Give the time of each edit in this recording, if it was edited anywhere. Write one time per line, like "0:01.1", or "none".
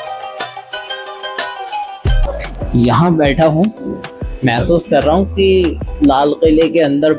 0:02.2